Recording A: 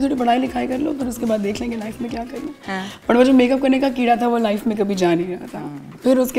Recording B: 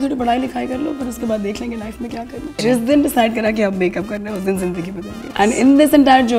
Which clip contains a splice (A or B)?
B